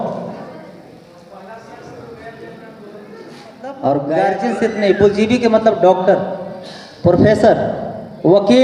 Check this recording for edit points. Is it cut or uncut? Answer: cut